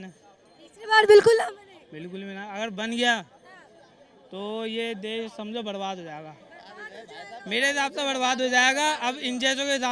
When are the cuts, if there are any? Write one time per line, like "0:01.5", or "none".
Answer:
none